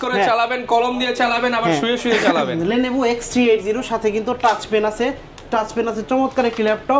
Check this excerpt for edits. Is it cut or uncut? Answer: uncut